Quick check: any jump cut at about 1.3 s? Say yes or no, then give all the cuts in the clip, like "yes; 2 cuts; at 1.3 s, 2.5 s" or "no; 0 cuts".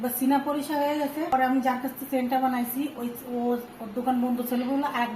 yes; 1 cut; at 1.3 s